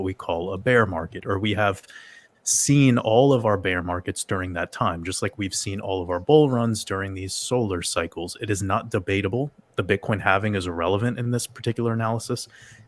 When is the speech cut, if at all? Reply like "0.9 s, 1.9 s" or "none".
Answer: none